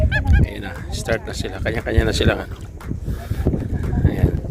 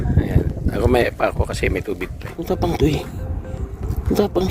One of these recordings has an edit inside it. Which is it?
second; 1 cut; at 2.3 s

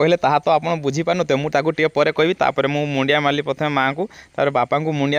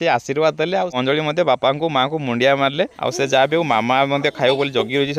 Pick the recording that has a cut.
second; 2 cuts; at 1.0 s, 3.0 s

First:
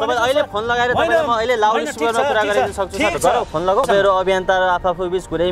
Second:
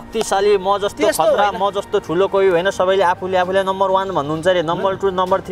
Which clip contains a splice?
first; 1 cut; at 3.9 s

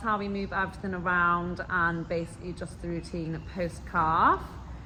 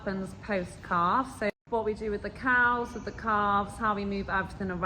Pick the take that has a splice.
second; 1 cut; at 1.5 s

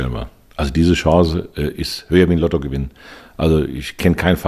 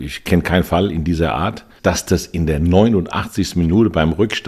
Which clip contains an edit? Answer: second; 1 cut; at 1.7 s

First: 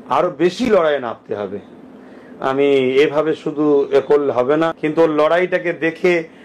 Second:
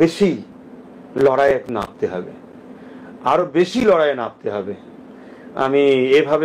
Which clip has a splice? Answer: first; 1 cut; at 4.7 s

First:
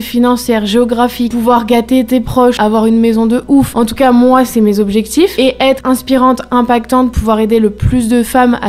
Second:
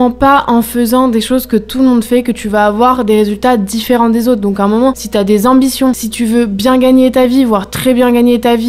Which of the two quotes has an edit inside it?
first; 4 cuts; at 1.3 s, 2.6 s, 3.7 s, 5.7 s

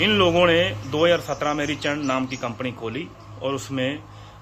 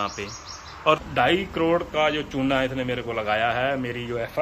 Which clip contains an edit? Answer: second; 1 cut; at 1.0 s

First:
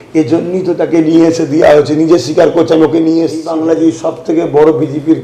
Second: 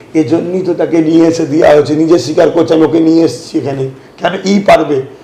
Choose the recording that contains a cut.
first; 1 cut; at 3.5 s

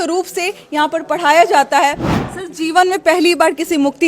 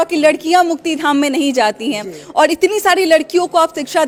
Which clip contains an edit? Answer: first; 1 cut; at 2.1 s

